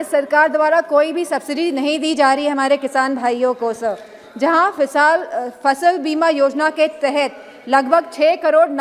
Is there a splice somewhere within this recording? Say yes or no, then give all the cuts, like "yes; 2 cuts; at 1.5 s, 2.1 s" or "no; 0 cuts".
no; 0 cuts